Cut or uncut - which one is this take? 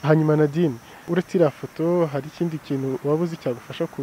cut